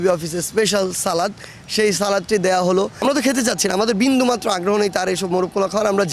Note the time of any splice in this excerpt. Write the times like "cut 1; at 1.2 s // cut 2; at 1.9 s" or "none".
cut 1; at 3.0 s